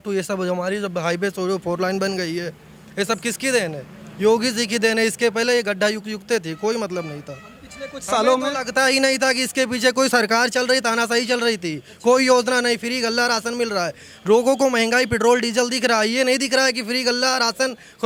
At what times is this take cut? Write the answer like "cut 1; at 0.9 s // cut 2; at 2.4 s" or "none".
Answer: none

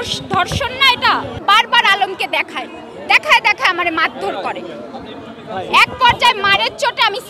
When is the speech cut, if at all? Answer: cut 1; at 1.4 s

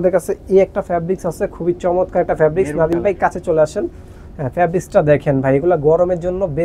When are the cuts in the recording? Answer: none

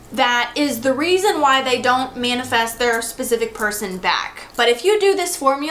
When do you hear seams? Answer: cut 1; at 4.4 s

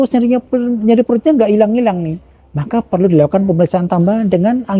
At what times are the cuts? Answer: none

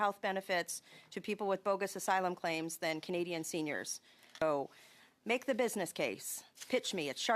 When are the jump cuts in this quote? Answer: cut 1; at 4.4 s

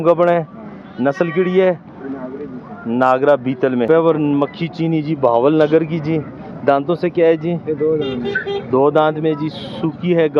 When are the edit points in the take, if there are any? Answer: cut 1; at 3.9 s

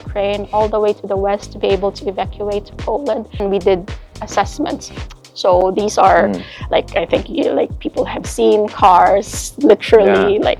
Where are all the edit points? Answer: none

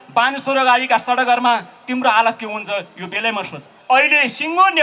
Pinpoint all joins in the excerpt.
cut 1; at 3.7 s

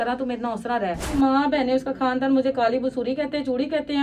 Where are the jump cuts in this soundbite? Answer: cut 1; at 1.1 s

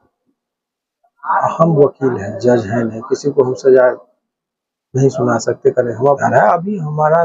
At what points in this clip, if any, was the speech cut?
cut 1; at 6.2 s

